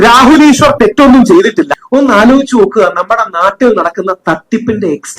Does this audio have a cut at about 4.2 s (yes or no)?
no